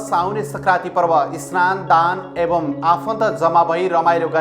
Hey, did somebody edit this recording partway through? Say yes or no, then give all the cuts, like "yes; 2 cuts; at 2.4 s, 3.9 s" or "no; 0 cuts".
no; 0 cuts